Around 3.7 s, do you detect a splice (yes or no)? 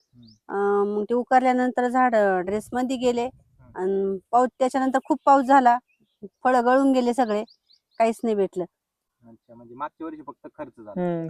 no